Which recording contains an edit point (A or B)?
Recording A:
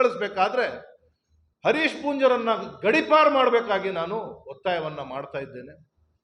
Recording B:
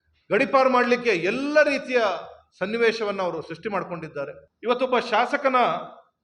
B